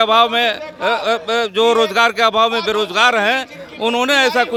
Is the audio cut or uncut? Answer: uncut